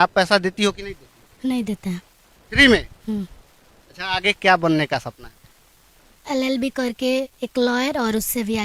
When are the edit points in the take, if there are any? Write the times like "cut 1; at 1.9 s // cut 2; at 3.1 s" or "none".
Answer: none